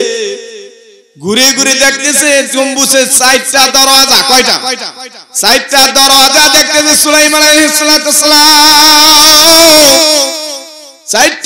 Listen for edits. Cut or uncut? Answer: uncut